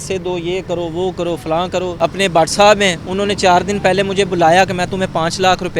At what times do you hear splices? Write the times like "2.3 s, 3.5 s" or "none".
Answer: 1.9 s